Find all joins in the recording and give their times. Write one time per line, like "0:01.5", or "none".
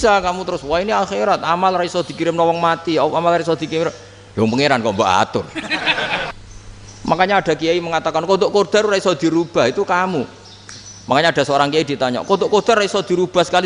0:06.3